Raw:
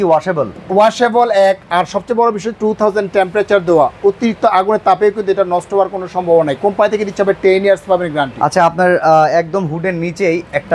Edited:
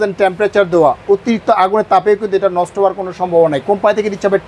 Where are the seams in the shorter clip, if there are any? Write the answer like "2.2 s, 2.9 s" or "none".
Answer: none